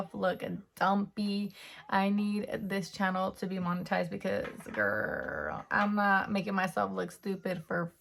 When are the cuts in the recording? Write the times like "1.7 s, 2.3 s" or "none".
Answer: none